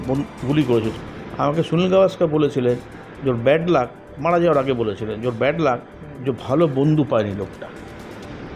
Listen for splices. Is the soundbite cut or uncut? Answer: cut